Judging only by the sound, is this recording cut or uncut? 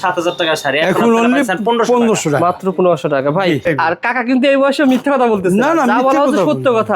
cut